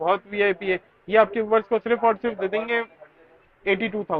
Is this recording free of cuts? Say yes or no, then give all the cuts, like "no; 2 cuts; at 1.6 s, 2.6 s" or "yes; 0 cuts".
yes; 0 cuts